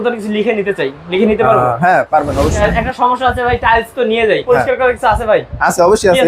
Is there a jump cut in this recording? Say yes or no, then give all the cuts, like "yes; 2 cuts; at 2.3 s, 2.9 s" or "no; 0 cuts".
yes; 2 cuts; at 2.6 s, 4.4 s